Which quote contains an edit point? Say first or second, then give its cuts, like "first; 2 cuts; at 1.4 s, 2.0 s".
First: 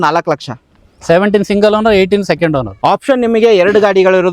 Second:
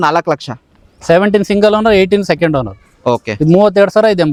first; 1 cut; at 2.7 s